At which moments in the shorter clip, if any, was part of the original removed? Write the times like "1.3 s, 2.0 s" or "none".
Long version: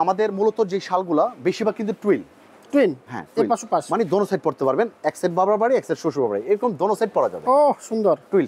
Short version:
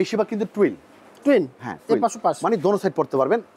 none